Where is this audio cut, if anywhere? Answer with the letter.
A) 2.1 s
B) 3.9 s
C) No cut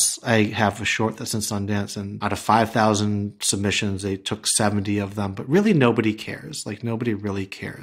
A